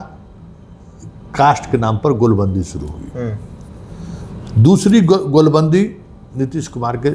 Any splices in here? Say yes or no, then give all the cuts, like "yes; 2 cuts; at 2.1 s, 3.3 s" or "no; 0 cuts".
no; 0 cuts